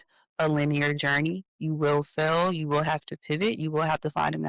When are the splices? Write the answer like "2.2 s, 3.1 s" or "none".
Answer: none